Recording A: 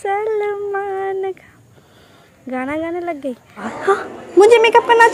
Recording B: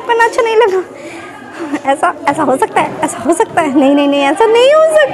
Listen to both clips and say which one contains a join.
A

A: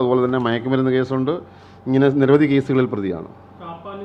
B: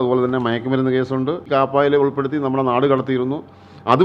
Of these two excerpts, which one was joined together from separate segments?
B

